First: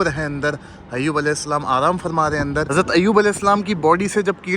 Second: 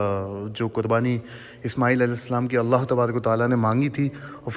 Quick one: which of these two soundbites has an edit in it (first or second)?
first